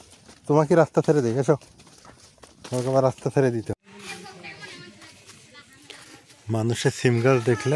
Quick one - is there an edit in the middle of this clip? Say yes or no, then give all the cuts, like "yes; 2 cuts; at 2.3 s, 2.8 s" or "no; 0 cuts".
yes; 1 cut; at 3.7 s